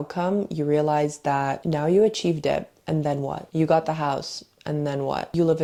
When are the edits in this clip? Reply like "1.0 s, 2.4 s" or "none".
none